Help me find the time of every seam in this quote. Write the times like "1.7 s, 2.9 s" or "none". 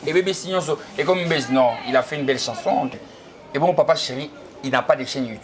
3.0 s